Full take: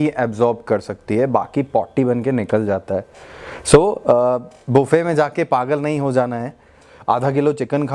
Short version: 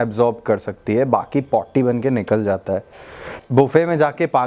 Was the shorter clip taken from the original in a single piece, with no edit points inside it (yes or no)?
no